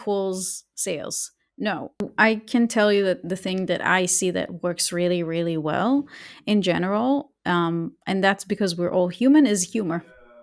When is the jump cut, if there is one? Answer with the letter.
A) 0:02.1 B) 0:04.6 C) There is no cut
A